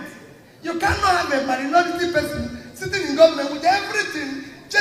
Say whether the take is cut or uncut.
uncut